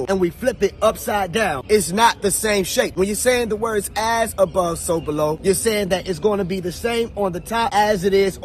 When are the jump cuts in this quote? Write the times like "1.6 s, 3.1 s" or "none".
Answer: none